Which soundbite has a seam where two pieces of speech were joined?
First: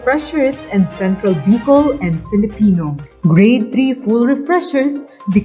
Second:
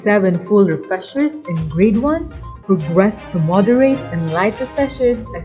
first; 1 cut; at 3.0 s

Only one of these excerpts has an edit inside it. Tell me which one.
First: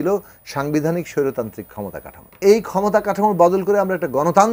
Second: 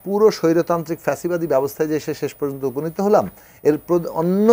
first; 1 cut; at 2.4 s

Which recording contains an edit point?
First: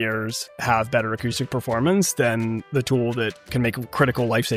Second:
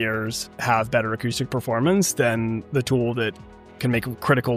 first; 1 cut; at 3.4 s

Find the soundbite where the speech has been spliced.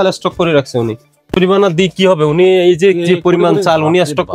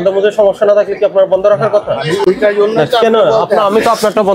first; 1 cut; at 1.1 s

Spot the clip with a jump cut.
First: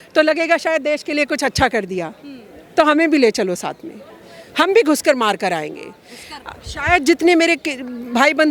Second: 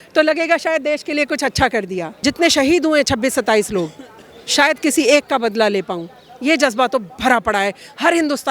second; 1 cut; at 2.0 s

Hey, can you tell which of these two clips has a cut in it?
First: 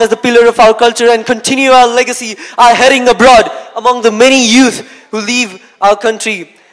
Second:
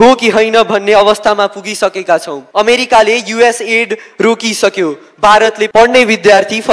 second; 2 cuts; at 2.4 s, 5.7 s

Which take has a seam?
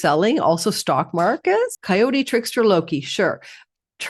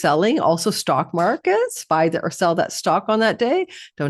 first; 1 cut; at 1.8 s

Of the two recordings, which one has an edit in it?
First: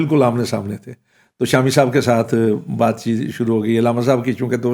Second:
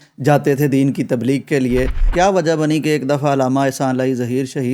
second; 1 cut; at 2.0 s

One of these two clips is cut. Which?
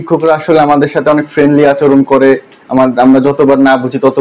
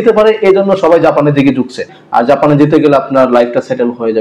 second; 1 cut; at 1.9 s

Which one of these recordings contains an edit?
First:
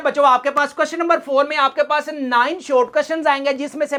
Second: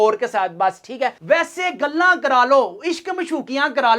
second; 1 cut; at 1.1 s

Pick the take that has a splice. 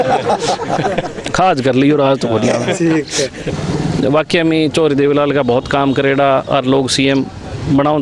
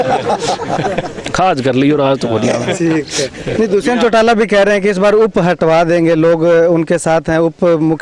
first; 1 cut; at 3.4 s

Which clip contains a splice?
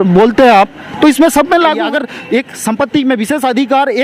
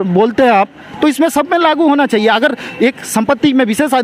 first; 1 cut; at 1.8 s

